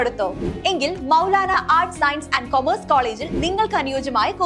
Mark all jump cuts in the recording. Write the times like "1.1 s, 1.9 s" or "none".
none